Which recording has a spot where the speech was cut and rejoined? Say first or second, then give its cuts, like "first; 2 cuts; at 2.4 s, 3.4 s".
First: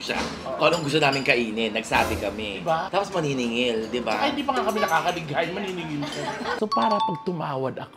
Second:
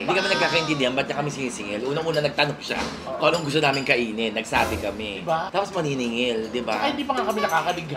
first; 1 cut; at 6.5 s